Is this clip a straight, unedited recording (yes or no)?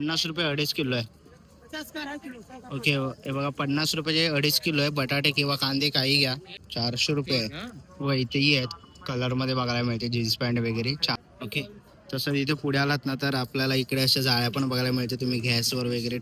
no